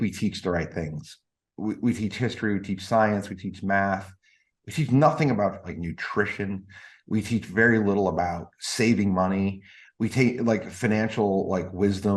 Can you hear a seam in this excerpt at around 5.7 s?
yes; 1 cut; at 5.7 s

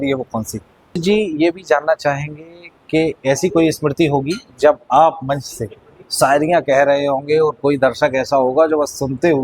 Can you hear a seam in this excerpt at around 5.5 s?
no; 1 cut; at 1.0 s

